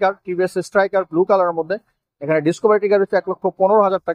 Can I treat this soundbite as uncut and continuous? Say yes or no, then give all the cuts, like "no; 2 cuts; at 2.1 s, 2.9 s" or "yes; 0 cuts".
yes; 0 cuts